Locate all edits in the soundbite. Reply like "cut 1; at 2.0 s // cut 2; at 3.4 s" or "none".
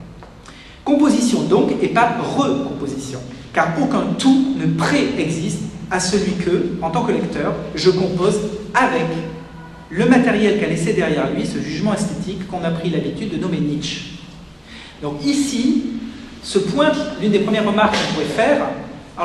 cut 1; at 3.1 s